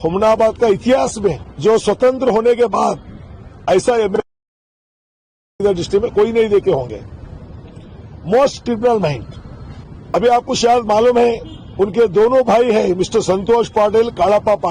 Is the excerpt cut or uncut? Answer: uncut